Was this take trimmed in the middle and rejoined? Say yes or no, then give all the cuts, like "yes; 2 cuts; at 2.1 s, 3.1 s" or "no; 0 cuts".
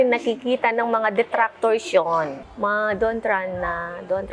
yes; 1 cut; at 2.4 s